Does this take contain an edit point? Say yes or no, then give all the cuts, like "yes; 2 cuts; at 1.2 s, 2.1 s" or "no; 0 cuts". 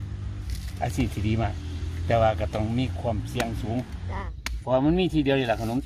yes; 1 cut; at 4.3 s